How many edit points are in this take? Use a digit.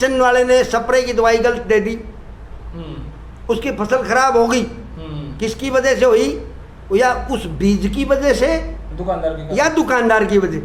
0